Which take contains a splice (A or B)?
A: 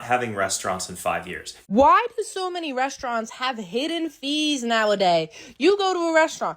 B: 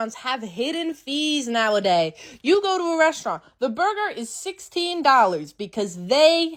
A